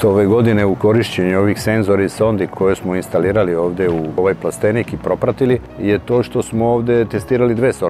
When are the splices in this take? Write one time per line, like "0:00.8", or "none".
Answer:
0:02.5
0:04.2
0:05.7